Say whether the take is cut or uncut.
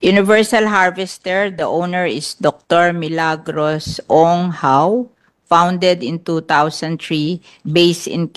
uncut